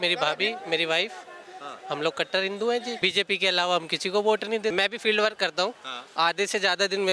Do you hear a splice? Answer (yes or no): yes